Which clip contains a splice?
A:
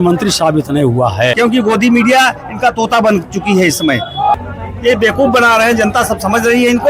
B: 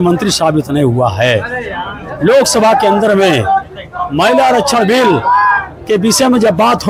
A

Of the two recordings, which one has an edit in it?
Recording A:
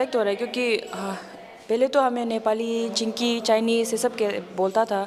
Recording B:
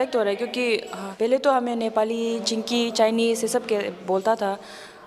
B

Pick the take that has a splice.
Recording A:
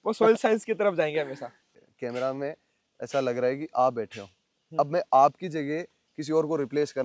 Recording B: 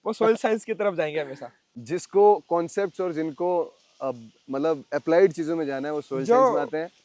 A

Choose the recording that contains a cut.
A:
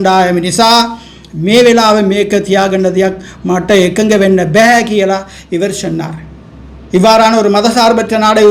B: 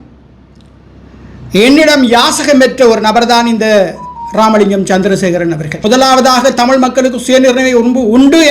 B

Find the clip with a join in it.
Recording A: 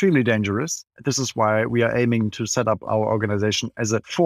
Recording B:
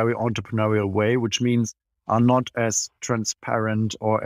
A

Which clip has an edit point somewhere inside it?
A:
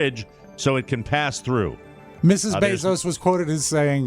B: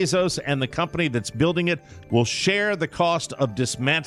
A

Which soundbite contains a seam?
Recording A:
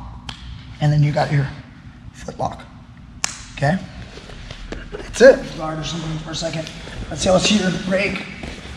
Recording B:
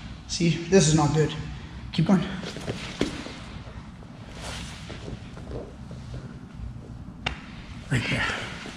A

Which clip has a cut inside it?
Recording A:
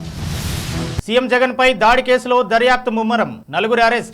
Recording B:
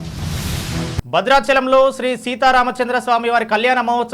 A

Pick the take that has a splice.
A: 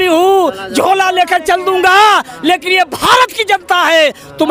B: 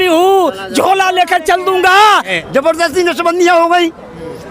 B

